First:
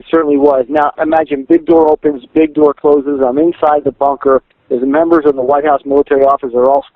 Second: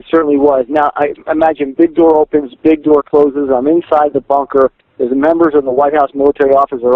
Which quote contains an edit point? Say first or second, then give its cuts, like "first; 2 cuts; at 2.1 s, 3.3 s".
first; 1 cut; at 0.9 s